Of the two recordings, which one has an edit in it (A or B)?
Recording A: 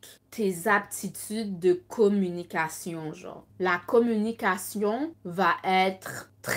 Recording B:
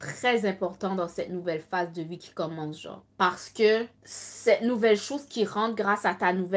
A